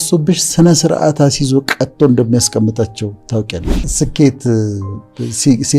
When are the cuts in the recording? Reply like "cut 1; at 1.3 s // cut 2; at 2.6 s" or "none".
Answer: cut 1; at 3.8 s

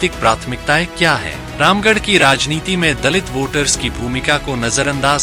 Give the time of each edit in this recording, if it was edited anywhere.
none

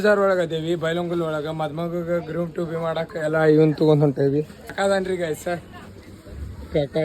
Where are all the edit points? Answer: cut 1; at 4.7 s

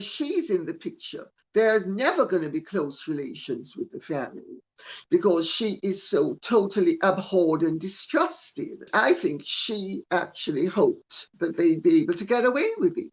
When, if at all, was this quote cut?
cut 1; at 8.8 s

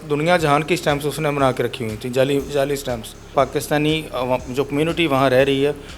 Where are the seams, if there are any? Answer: cut 1; at 3.3 s

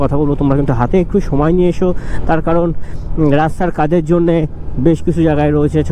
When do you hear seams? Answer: none

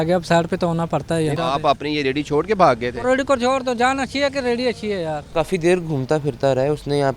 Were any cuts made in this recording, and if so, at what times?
cut 1; at 1.4 s // cut 2; at 5.2 s

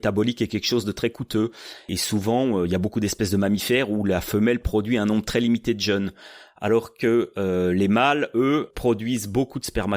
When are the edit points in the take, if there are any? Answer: cut 1; at 1.9 s // cut 2; at 8.7 s

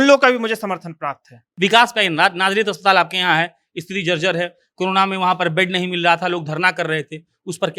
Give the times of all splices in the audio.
cut 1; at 1.4 s

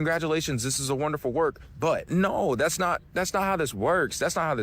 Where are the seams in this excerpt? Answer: cut 1; at 2.0 s

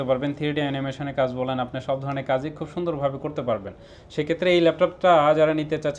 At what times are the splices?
none

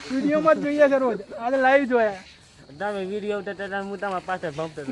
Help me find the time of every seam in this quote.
none

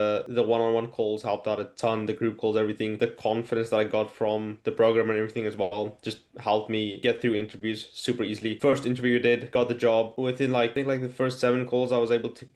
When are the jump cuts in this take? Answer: cut 1; at 3.0 s

